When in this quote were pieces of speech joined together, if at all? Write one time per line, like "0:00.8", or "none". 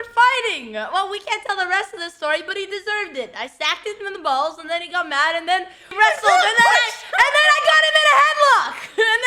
0:05.8